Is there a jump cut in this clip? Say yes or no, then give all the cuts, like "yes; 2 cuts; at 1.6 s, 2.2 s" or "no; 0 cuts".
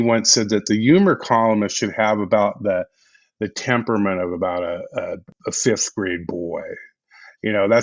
yes; 1 cut; at 5.3 s